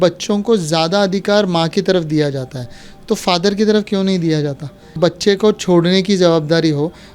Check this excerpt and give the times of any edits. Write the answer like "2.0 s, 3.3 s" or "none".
5.0 s